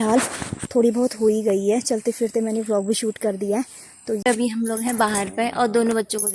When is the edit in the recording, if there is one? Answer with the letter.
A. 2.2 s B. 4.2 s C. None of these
B